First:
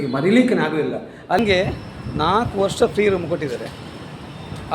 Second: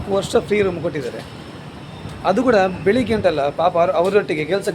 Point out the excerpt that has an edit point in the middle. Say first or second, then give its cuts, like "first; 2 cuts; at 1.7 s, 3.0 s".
first; 1 cut; at 1.4 s